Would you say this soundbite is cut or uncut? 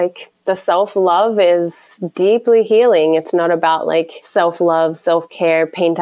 cut